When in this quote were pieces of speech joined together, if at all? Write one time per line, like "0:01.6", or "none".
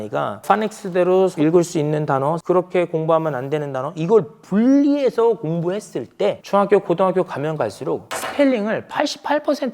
0:02.4
0:06.4
0:08.1